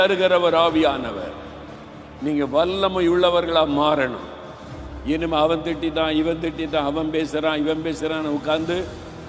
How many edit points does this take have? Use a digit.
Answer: 0